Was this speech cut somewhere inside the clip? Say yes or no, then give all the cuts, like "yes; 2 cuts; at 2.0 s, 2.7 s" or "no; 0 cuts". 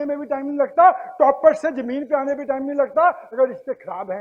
no; 0 cuts